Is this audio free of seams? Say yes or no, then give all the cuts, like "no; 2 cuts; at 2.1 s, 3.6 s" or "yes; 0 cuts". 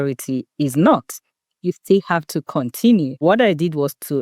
no; 1 cut; at 3.2 s